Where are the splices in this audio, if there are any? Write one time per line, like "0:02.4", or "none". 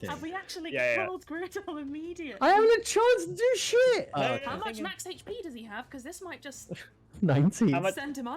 0:04.1